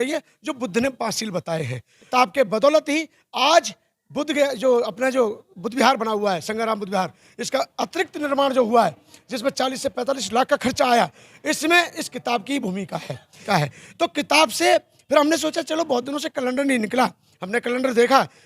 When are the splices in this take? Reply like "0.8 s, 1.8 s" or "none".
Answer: 2.1 s, 13.4 s

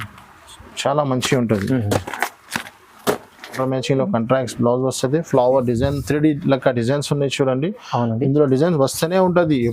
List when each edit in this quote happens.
3.6 s

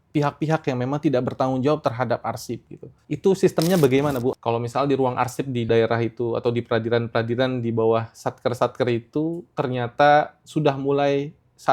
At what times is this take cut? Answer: 3.0 s, 4.3 s

